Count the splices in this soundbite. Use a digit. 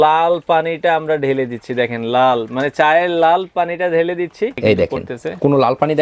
1